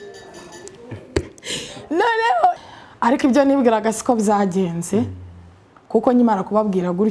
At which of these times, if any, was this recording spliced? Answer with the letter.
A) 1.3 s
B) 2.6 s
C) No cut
B